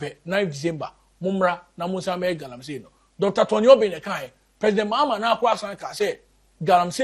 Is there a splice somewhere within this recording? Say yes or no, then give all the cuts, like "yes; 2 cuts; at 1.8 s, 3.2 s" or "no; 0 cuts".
no; 0 cuts